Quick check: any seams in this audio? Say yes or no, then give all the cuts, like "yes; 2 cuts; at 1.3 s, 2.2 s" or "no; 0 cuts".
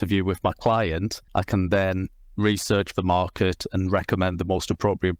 yes; 1 cut; at 1.2 s